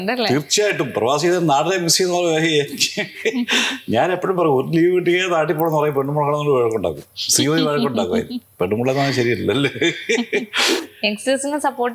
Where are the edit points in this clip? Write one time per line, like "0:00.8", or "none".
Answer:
0:10.8

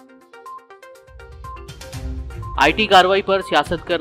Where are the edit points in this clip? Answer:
0:02.4

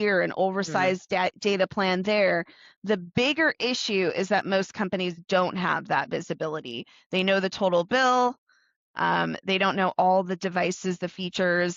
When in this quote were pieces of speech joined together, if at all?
none

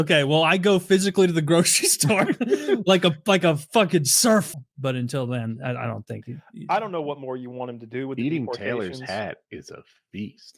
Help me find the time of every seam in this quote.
0:04.6

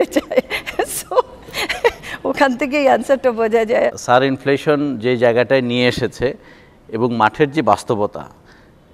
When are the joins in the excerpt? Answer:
none

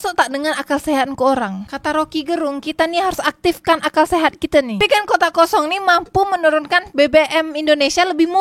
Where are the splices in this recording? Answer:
0:04.8

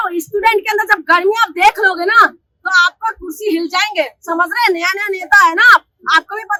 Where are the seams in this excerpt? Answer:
none

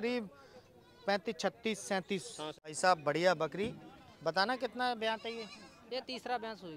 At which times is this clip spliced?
0:02.7

